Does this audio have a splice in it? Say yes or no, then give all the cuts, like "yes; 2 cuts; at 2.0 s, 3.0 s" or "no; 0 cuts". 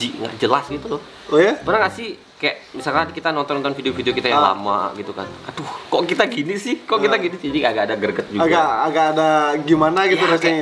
no; 0 cuts